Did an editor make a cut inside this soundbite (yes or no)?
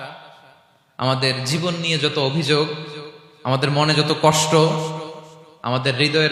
no